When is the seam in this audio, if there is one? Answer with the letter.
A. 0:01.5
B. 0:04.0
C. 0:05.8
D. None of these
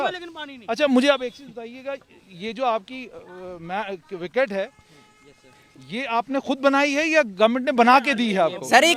D